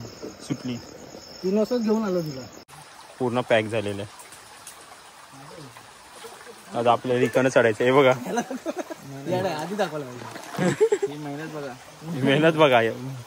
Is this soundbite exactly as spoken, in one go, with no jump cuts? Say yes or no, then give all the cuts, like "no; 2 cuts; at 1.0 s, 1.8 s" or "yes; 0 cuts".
no; 1 cut; at 2.6 s